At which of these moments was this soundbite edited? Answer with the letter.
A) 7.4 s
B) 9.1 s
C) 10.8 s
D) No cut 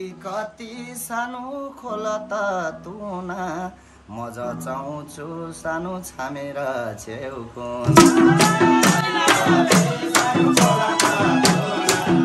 D